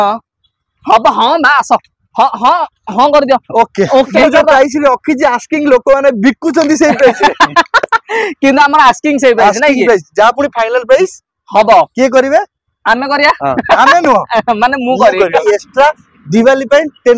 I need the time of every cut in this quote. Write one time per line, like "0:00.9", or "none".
0:04.1
0:15.4